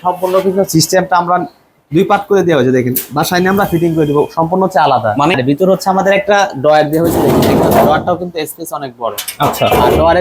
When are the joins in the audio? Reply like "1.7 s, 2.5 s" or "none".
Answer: 5.4 s